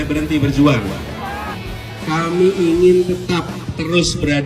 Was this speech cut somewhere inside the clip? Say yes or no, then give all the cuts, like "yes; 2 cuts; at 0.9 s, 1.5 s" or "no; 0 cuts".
yes; 1 cut; at 1.5 s